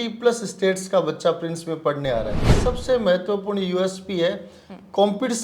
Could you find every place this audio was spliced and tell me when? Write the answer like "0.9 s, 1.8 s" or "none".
2.5 s